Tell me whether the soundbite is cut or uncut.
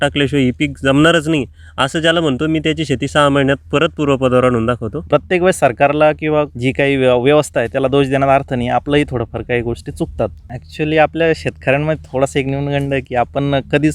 cut